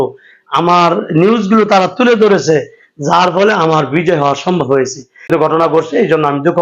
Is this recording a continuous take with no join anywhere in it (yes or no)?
no